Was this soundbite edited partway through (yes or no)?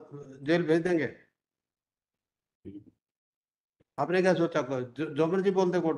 no